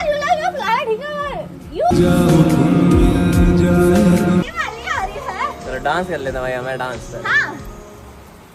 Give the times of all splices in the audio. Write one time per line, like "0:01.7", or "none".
0:04.5